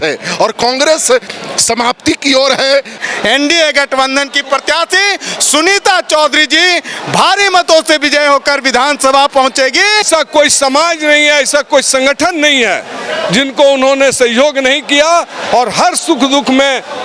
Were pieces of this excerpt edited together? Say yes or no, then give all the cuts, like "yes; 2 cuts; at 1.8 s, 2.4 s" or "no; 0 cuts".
yes; 2 cuts; at 3.0 s, 10.1 s